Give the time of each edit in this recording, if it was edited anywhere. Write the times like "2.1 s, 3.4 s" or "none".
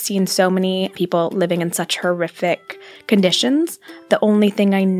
0.9 s, 4.1 s